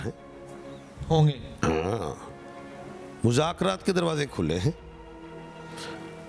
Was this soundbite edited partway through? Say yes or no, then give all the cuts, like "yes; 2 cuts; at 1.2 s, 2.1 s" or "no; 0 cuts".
no; 0 cuts